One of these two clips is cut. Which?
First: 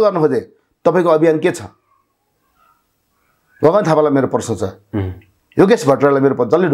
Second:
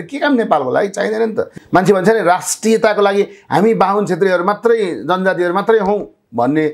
second; 1 cut; at 1.5 s

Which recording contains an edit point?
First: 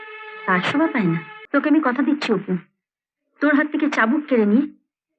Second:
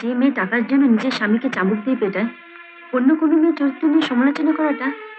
first; 1 cut; at 1.3 s

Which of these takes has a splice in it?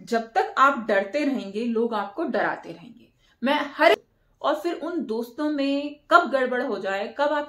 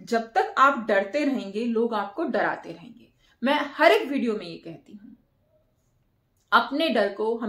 first; 1 cut; at 3.9 s

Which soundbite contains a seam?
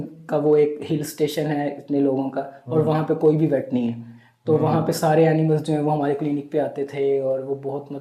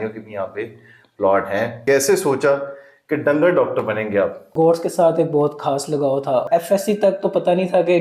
second; 3 cuts; at 1.8 s, 4.4 s, 6.5 s

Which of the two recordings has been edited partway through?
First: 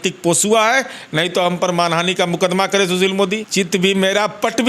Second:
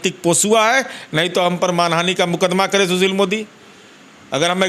first; 1 cut; at 3.5 s

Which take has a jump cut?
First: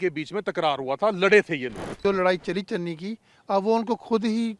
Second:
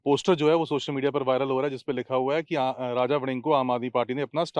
first; 1 cut; at 1.9 s

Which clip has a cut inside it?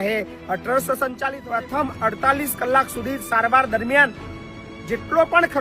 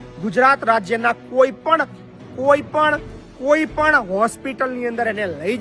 first; 1 cut; at 1.2 s

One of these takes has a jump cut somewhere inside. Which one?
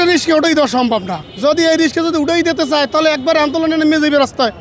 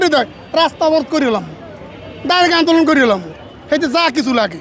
first; 1 cut; at 1.2 s

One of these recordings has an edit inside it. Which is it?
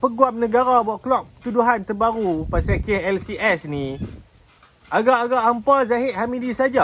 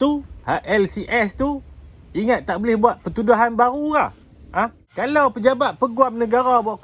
second; 1 cut; at 4.9 s

